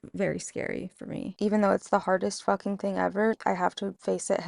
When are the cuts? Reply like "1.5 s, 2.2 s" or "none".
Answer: 1.3 s, 3.5 s